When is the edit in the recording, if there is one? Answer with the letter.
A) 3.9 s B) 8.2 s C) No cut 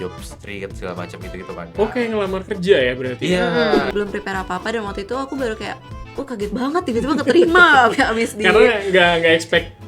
A